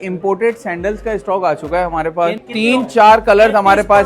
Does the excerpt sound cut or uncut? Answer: cut